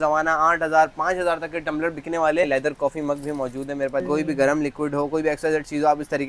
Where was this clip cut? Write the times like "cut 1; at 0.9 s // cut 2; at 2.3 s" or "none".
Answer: cut 1; at 2.5 s // cut 2; at 4.0 s